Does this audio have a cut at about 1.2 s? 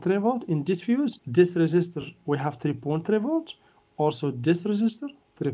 yes; 1 cut; at 1.2 s

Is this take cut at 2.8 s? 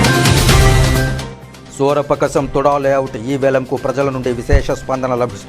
no; 1 cut; at 1.2 s

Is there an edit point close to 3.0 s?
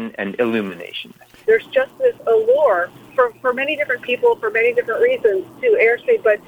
yes; 2 cuts; at 1.4 s, 3.0 s

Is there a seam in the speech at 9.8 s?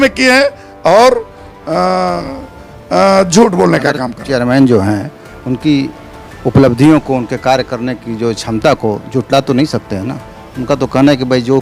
no; 1 cut; at 4.1 s

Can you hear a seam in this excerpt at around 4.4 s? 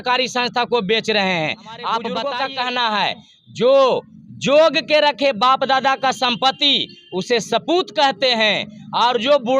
no; 1 cut; at 2.3 s

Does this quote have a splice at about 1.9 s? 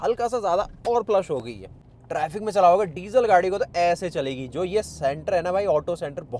yes; 1 cut; at 1.9 s

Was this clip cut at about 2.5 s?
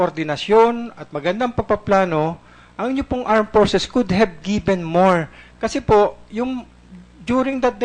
yes; 1 cut; at 2.5 s

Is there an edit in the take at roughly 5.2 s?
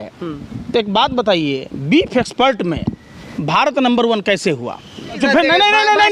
yes; 1 cut; at 5.2 s

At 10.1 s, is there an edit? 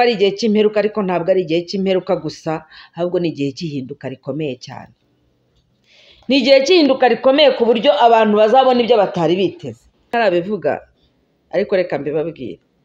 yes; 1 cut; at 10.1 s

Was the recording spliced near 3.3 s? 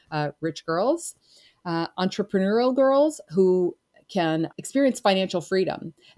no; 1 cut; at 4.6 s

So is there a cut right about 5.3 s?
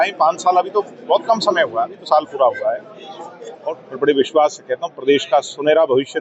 no; 1 cut; at 3.5 s

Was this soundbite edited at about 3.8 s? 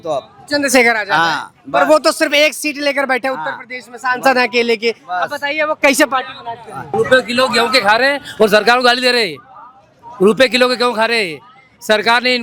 no; 0 cuts

